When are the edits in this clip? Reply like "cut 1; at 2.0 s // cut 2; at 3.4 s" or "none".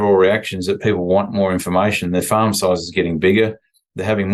none